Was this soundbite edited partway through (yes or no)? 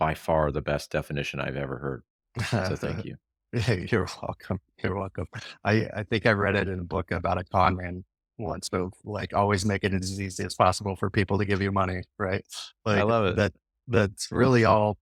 no